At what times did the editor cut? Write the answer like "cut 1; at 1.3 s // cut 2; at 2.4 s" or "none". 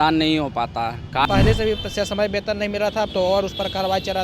cut 1; at 1.2 s